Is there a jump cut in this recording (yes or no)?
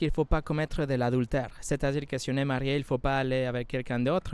no